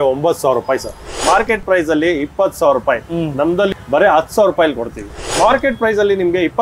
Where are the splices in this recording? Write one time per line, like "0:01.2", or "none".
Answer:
0:01.2
0:03.7
0:05.2